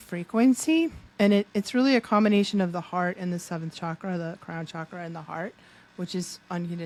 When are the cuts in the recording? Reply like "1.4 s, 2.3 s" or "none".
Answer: none